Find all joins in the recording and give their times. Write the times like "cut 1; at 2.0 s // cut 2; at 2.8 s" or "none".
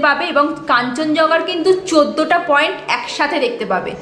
none